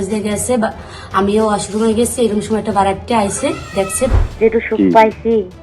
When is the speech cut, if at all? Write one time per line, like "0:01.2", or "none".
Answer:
0:04.1

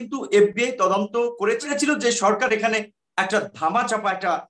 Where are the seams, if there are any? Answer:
0:01.6

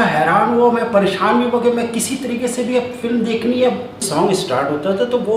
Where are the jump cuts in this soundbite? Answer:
0:04.0

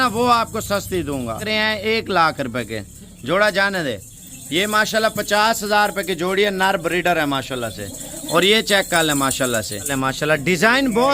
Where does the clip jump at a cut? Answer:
0:01.4
0:09.9

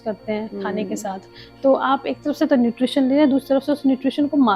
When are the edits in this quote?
none

